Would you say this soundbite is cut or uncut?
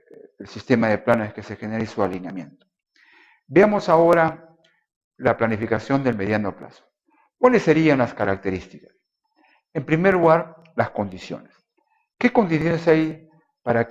cut